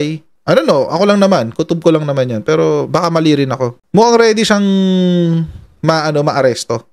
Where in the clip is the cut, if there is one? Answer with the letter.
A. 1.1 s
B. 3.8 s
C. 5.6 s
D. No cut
B